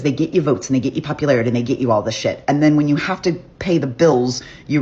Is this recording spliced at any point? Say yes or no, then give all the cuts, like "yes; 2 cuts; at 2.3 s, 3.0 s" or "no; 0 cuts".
no; 0 cuts